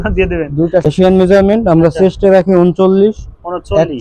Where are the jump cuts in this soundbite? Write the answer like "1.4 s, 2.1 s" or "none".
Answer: 0.9 s